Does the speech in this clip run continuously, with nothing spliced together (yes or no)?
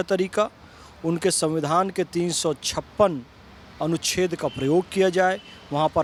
yes